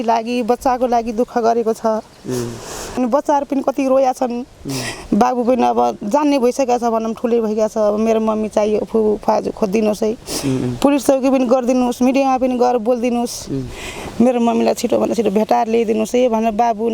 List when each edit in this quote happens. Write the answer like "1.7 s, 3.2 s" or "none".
2.9 s